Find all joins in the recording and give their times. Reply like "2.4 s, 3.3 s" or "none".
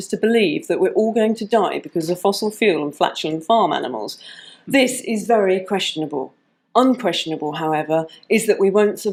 none